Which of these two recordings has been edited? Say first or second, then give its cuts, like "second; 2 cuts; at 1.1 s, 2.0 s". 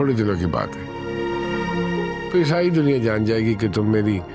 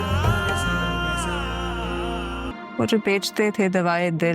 second; 1 cut; at 2.5 s